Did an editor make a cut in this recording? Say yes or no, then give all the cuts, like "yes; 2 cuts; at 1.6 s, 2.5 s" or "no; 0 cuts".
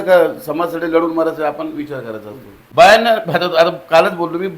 yes; 1 cut; at 2.6 s